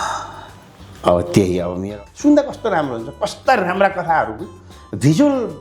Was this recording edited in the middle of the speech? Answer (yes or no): yes